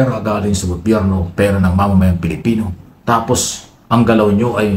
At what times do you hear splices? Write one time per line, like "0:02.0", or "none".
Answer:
0:02.8